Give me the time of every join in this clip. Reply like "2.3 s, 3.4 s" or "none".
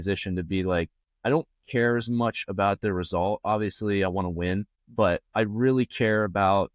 1.0 s, 4.8 s